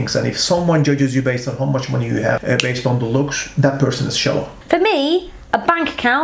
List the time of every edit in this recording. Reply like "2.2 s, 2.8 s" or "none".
2.4 s, 4.6 s